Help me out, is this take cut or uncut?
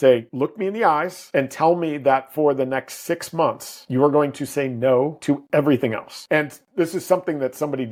uncut